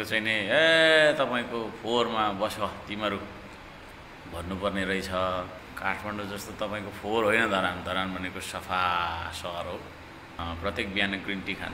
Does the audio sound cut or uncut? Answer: cut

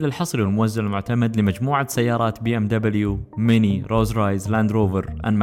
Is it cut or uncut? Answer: uncut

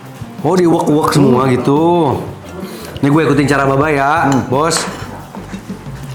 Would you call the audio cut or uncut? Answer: uncut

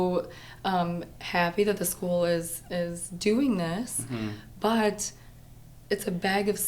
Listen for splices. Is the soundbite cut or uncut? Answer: uncut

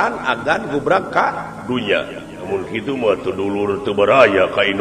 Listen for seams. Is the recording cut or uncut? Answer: cut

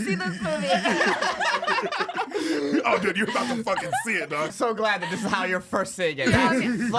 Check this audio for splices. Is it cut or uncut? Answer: cut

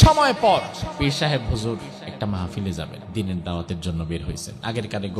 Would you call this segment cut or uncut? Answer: cut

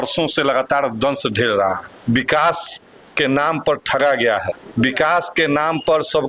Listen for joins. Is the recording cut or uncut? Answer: cut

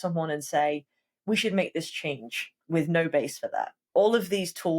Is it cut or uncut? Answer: cut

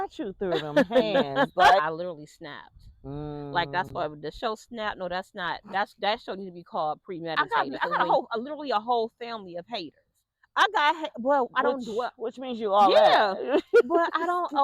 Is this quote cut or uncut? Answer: cut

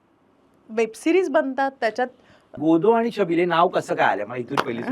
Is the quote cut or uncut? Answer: cut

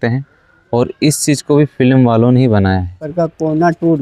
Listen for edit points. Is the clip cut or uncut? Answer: cut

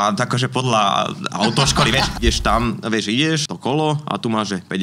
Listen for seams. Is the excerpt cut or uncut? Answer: cut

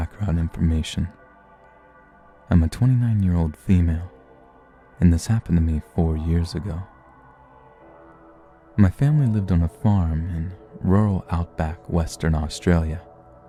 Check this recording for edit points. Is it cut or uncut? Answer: uncut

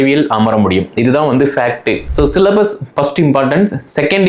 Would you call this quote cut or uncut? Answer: cut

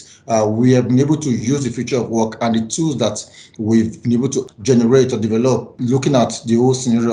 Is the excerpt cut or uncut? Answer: cut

